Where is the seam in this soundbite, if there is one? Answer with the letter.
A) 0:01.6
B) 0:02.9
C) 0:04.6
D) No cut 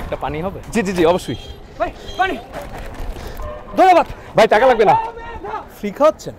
A